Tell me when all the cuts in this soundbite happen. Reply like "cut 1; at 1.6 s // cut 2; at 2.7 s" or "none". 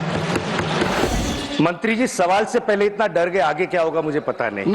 cut 1; at 1.1 s